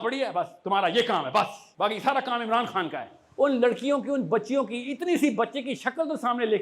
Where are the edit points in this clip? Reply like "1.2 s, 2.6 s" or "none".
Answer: 1.6 s, 3.2 s